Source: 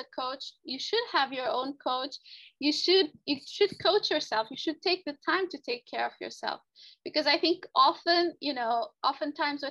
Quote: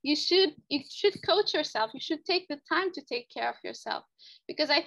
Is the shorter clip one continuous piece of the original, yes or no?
yes